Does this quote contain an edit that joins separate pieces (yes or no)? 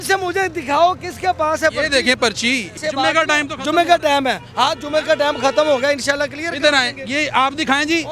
no